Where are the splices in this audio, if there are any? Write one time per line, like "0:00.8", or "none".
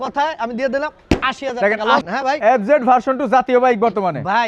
none